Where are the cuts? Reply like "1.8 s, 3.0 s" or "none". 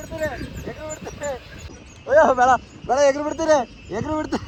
none

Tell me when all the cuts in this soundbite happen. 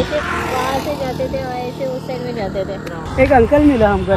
3.0 s

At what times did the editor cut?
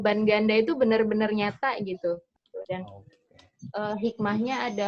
2.3 s

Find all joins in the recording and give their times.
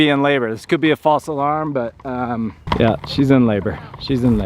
2.6 s

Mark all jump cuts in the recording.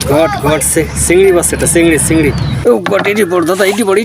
2.5 s

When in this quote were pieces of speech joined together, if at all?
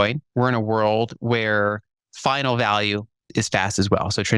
3.3 s

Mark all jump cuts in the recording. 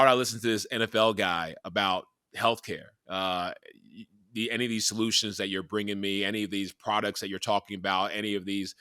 none

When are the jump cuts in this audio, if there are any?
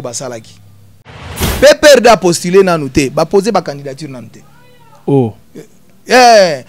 1.4 s

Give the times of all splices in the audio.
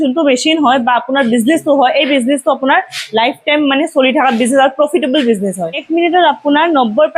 5.8 s

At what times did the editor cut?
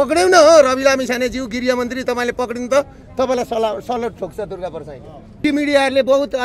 5.4 s

